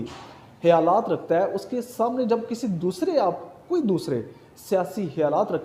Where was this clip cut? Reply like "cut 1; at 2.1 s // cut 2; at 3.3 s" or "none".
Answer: none